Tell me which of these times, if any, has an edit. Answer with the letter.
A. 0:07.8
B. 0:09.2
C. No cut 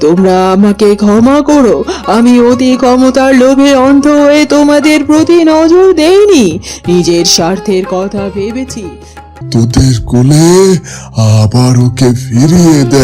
B